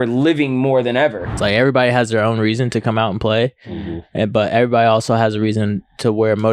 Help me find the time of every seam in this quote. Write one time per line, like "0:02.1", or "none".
0:01.4